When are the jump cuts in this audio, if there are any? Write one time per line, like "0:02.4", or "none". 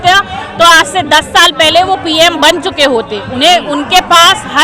none

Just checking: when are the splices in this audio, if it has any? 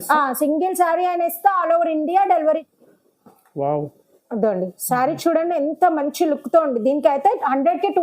0:02.6

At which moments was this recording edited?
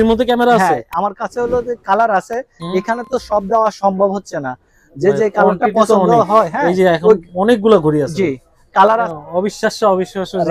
0:09.1

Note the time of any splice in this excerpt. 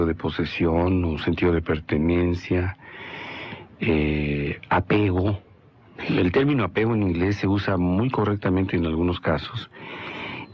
0:08.1

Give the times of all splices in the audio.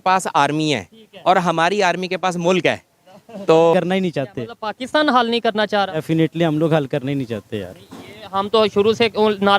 0:03.7

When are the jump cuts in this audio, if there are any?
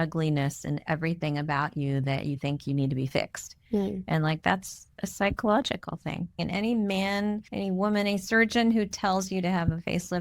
0:06.4
0:07.5

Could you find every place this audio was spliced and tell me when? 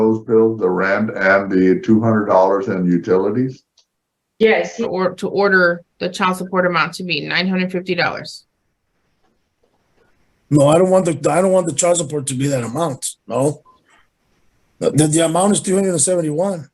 0:04.9

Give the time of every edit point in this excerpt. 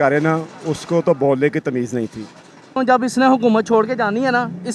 0:02.7

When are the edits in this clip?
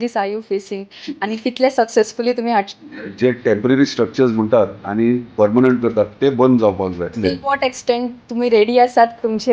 0:02.7
0:07.2

